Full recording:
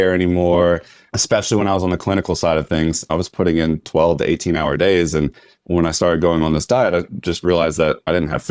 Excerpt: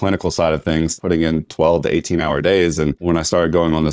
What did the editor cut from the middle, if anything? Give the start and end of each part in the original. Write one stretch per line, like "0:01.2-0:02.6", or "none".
0:03.0-0:03.3
0:05.3-0:05.7